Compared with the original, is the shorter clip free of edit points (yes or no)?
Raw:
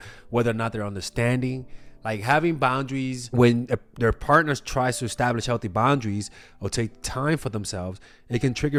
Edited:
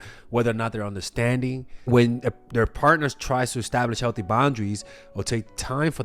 no